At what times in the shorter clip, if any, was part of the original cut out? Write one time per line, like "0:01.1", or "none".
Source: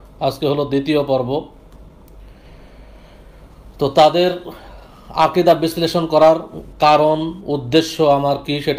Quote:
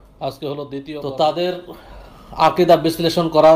0:00.9